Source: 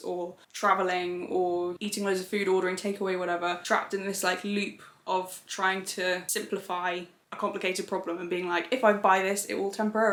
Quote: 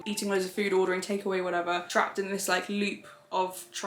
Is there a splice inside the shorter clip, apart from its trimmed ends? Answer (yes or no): no